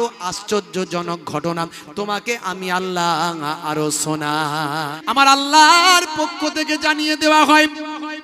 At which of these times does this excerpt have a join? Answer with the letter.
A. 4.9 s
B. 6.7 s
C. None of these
A